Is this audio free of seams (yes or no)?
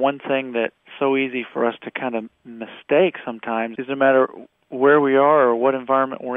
yes